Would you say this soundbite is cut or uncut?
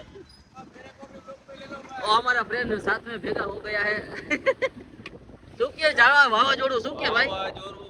uncut